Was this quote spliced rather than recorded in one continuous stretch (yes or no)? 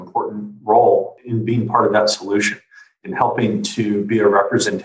yes